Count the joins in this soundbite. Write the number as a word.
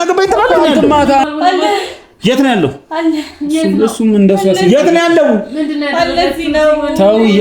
one